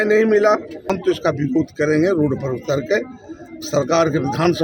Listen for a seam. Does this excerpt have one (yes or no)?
yes